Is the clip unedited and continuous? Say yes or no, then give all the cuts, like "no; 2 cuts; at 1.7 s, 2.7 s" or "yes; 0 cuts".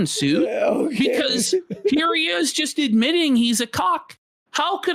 yes; 0 cuts